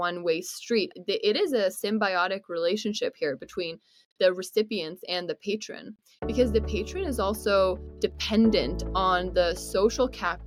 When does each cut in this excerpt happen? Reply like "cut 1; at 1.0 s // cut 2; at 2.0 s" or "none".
none